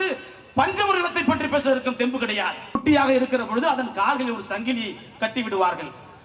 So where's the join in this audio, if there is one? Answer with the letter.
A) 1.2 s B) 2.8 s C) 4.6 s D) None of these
B